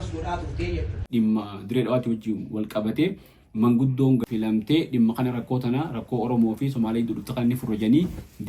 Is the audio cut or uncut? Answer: cut